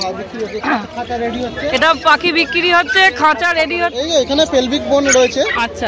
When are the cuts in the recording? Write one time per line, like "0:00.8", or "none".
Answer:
0:03.9